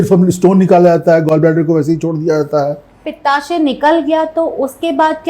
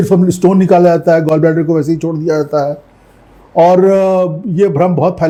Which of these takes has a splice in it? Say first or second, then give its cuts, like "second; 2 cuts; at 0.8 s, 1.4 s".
first; 1 cut; at 3.1 s